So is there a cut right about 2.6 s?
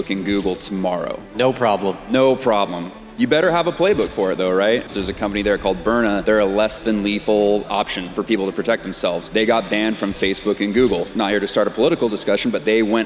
no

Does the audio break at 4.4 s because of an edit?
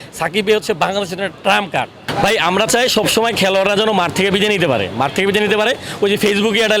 no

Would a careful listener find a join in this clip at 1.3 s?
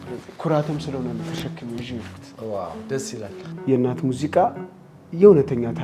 no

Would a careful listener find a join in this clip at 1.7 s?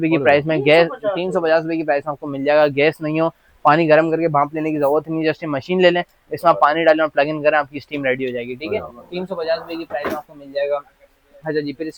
no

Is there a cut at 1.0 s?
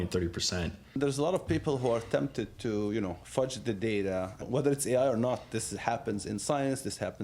yes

